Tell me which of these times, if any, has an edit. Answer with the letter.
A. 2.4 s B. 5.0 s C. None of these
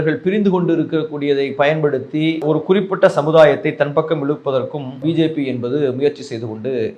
B